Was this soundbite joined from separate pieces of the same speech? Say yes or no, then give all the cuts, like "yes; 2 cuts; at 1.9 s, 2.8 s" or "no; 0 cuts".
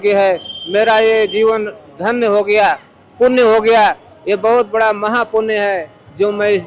no; 0 cuts